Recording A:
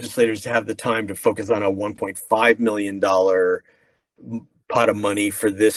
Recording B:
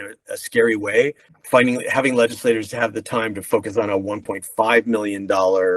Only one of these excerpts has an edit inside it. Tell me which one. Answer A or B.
B